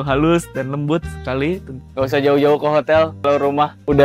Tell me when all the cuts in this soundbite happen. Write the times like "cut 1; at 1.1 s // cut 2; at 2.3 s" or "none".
cut 1; at 1.8 s // cut 2; at 3.3 s